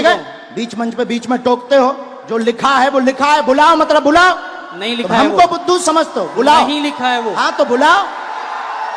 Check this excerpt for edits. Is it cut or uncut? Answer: uncut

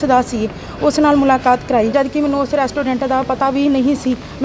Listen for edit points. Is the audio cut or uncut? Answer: cut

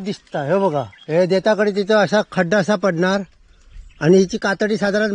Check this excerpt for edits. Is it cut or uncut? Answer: uncut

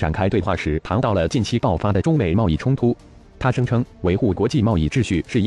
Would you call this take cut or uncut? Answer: cut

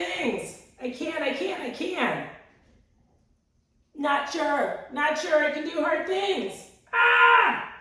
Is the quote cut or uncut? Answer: uncut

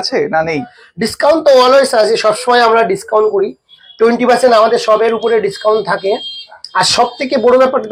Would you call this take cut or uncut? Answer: uncut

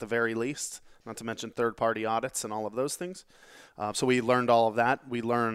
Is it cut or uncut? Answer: uncut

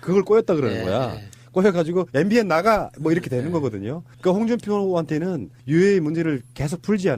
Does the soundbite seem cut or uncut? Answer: cut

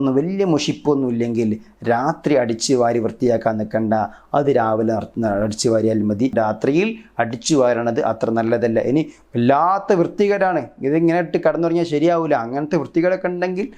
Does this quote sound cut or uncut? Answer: cut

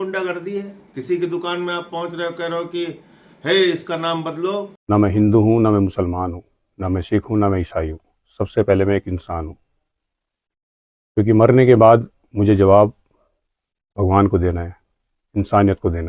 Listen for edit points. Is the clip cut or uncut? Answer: cut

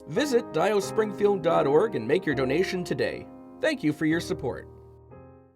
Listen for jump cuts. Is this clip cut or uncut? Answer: cut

